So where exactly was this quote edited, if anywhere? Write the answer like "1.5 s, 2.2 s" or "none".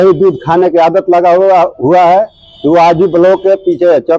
none